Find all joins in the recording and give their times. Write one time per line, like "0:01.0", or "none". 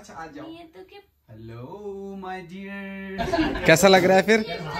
0:03.1